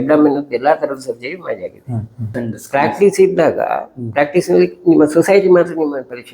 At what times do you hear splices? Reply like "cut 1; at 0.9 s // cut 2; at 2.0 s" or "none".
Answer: cut 1; at 2.4 s